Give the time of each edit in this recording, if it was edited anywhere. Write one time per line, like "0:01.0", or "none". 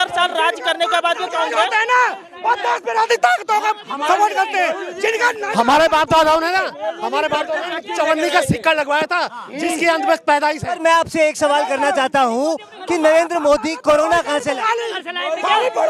none